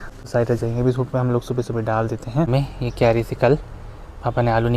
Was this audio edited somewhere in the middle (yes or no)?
yes